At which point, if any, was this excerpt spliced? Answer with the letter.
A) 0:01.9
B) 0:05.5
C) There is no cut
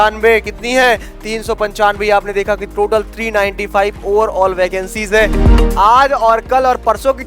B